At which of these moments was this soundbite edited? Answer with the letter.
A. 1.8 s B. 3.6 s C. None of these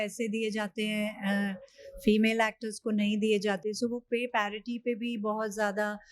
C